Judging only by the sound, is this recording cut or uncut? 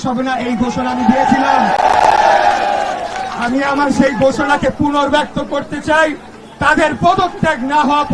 uncut